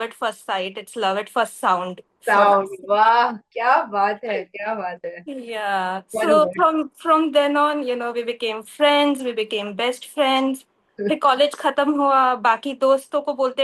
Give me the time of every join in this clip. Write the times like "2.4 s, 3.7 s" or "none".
none